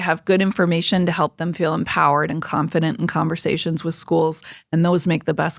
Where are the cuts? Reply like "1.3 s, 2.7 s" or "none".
none